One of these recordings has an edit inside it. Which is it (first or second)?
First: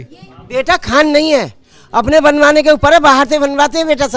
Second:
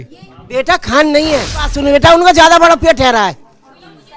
second